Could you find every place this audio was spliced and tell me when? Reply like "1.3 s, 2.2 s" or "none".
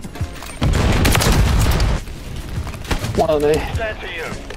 2.0 s